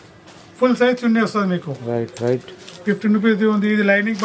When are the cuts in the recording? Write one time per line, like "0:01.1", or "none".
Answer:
none